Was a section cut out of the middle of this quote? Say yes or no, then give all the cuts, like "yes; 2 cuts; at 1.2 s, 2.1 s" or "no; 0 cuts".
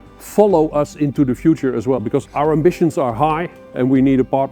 yes; 2 cuts; at 2.3 s, 3.6 s